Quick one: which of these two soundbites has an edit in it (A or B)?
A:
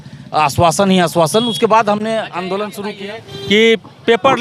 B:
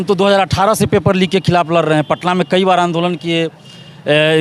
A